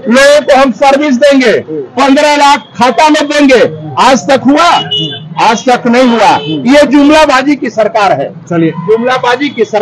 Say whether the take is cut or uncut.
uncut